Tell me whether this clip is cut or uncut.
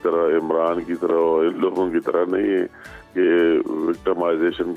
uncut